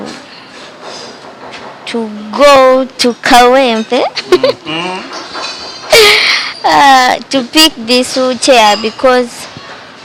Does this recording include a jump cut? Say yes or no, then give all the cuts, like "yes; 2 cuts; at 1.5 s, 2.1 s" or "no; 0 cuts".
no; 0 cuts